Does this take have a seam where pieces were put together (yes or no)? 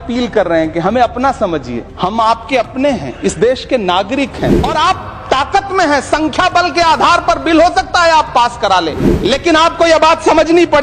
yes